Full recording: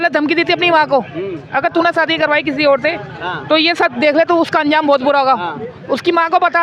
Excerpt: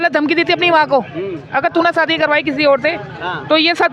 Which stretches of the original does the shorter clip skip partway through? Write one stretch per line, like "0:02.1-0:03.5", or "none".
none